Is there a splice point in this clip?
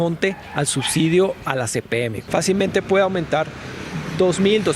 yes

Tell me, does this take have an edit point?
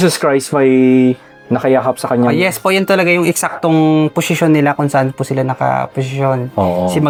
no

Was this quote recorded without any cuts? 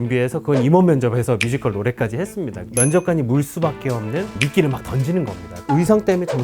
no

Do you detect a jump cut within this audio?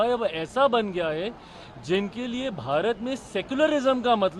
no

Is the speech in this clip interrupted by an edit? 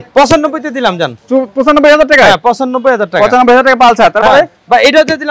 no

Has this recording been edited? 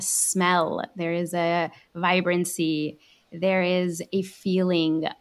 no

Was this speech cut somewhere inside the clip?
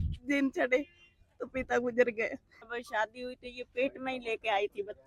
yes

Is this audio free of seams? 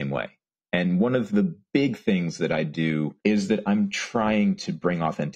no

